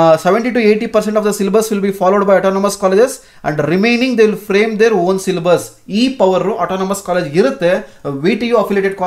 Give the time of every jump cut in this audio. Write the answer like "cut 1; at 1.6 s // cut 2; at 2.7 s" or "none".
none